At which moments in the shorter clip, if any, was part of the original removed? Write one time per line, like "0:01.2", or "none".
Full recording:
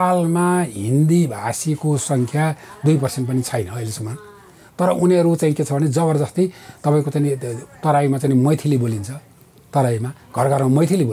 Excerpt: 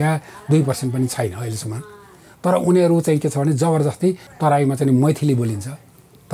0:04.3